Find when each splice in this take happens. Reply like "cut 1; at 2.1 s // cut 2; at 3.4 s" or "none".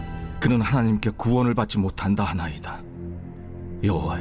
cut 1; at 3.1 s